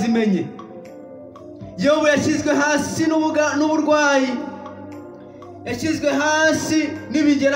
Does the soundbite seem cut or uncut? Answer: uncut